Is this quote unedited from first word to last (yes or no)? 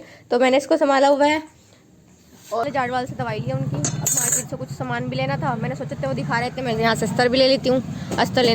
no